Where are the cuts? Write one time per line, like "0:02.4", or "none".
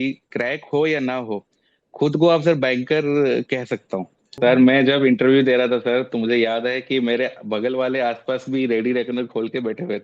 0:04.4

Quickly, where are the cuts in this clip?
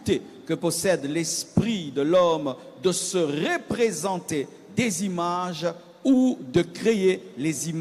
none

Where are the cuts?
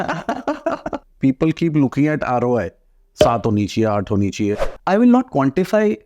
0:01.1
0:04.7

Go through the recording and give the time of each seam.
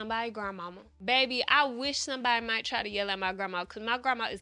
0:01.0

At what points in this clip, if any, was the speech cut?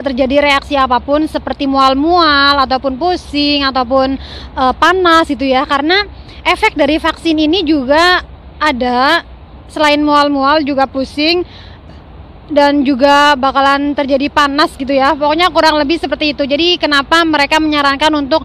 none

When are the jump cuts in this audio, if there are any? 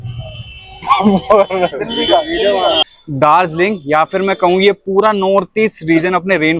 0:02.8

